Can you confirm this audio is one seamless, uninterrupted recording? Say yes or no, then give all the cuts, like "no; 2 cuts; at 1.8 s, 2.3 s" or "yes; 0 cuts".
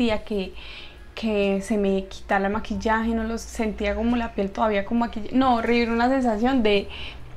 yes; 0 cuts